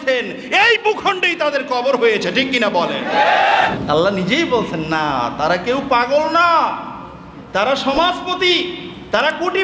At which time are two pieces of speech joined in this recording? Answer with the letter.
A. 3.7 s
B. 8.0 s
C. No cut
A